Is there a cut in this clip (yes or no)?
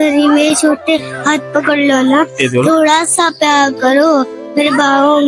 no